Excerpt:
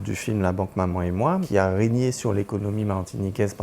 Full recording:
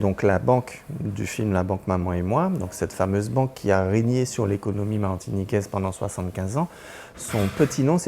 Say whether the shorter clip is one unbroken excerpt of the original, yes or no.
no